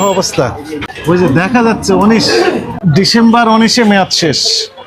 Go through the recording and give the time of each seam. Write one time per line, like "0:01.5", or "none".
0:00.8
0:02.7